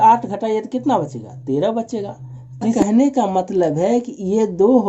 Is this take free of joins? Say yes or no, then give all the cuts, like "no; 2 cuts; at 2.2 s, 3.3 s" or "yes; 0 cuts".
no; 1 cut; at 2.8 s